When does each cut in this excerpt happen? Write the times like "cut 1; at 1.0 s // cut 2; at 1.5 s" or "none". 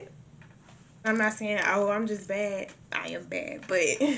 cut 1; at 1.1 s

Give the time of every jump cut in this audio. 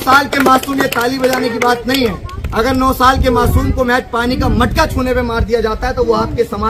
none

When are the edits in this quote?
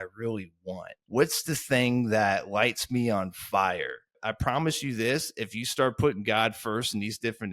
cut 1; at 0.9 s // cut 2; at 4.2 s

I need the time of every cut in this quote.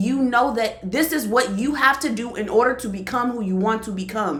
none

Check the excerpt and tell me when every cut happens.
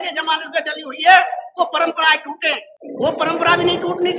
none

